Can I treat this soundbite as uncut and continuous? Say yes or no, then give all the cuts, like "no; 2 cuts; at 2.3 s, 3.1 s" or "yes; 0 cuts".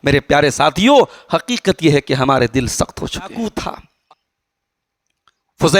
no; 1 cut; at 3.2 s